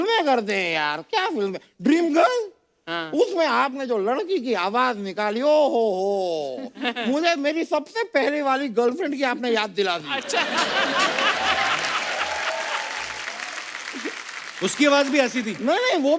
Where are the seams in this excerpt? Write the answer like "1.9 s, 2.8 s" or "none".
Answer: none

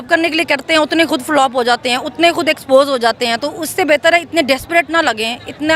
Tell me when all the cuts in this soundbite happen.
none

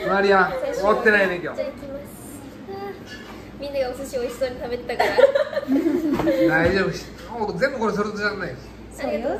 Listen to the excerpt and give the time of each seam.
1.5 s

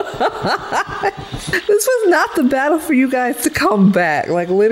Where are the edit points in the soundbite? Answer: 1.5 s

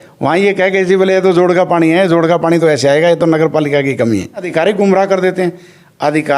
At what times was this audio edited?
4.5 s

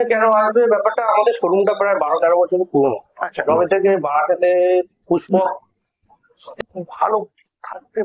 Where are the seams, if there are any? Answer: 6.6 s

